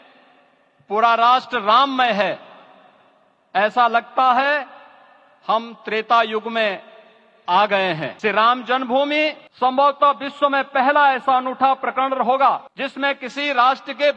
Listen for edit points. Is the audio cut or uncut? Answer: cut